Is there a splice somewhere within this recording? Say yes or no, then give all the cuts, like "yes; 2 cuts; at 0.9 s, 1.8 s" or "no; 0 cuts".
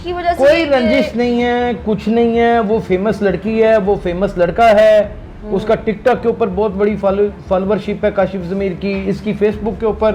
no; 0 cuts